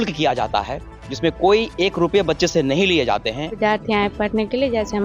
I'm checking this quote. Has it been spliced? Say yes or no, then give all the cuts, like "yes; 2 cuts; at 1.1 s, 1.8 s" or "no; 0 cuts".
yes; 1 cut; at 3.6 s